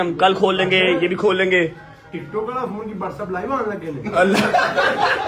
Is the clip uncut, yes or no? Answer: yes